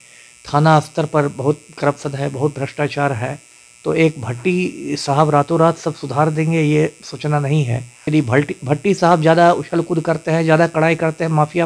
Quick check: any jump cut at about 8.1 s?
yes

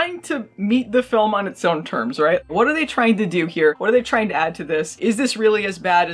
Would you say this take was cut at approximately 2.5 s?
no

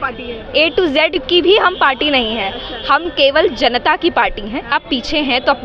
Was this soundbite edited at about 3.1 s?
no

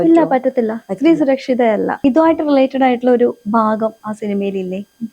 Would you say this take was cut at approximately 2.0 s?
yes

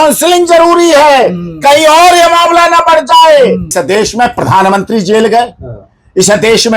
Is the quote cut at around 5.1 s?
no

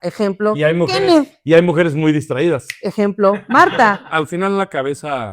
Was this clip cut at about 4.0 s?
yes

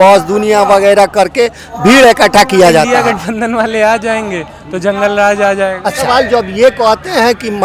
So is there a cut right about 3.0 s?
yes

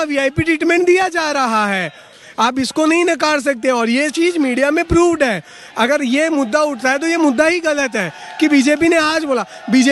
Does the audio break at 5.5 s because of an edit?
no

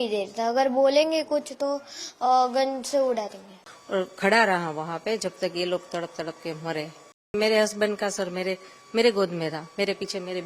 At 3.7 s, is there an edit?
yes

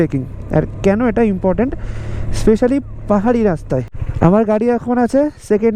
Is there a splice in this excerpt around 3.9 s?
no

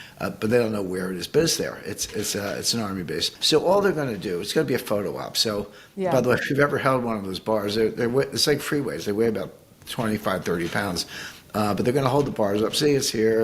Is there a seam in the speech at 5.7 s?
no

